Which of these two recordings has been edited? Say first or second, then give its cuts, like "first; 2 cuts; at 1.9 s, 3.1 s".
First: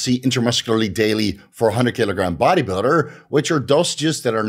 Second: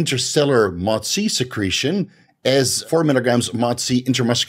second; 1 cut; at 2.8 s